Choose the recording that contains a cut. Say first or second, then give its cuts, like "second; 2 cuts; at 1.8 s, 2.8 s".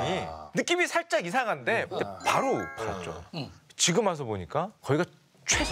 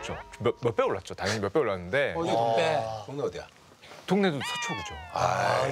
first; 1 cut; at 2.1 s